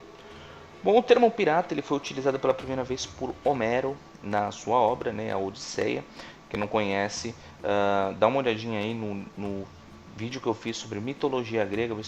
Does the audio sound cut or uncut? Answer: cut